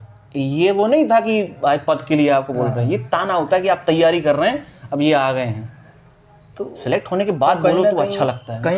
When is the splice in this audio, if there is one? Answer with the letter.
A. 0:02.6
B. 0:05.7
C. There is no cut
C